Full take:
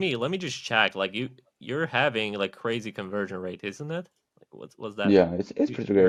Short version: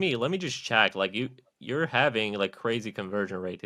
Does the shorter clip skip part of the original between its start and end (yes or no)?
no